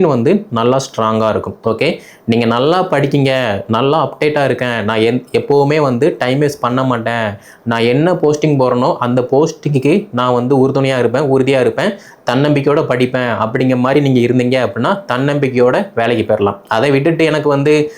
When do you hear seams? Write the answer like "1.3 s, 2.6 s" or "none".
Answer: none